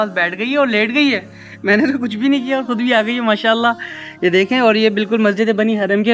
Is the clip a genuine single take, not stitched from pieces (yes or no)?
yes